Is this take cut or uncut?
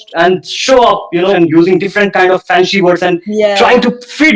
cut